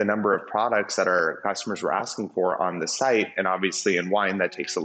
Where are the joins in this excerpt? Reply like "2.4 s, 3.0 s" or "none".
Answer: 1.4 s